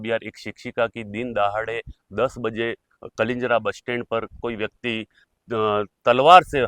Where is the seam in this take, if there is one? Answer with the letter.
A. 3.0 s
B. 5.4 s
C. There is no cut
C